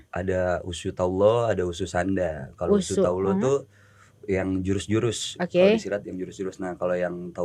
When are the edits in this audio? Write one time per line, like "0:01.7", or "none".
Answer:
none